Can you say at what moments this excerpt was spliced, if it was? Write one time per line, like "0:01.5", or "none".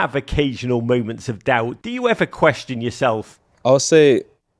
0:03.3